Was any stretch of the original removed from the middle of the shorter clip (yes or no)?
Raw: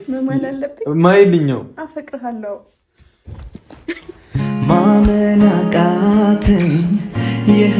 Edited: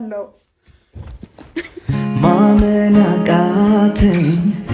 yes